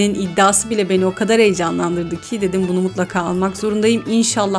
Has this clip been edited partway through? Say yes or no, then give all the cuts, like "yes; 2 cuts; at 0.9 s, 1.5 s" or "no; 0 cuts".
no; 0 cuts